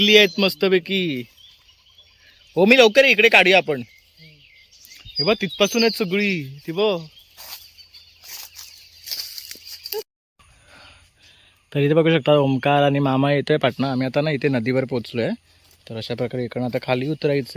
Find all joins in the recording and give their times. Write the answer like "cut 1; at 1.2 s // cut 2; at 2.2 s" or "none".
none